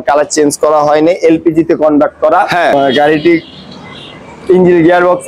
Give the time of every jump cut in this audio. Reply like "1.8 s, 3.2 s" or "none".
2.7 s